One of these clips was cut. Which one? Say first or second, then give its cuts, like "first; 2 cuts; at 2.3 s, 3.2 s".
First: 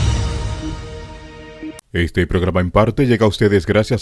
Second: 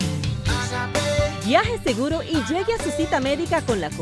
first; 1 cut; at 1.8 s